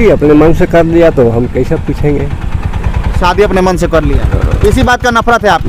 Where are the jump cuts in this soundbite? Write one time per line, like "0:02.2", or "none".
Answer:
none